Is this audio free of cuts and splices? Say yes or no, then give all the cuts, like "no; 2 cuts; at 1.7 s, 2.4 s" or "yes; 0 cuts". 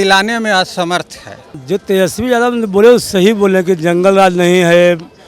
no; 1 cut; at 1.5 s